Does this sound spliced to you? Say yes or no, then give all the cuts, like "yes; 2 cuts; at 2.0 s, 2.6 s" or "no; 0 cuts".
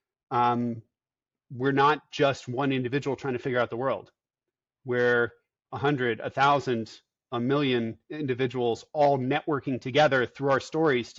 no; 0 cuts